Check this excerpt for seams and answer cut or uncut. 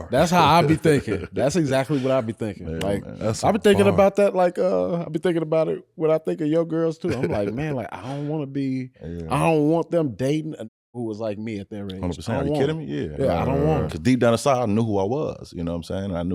uncut